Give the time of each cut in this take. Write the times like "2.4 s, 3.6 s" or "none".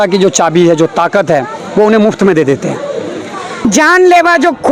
3.7 s